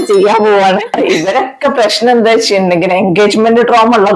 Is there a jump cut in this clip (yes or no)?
yes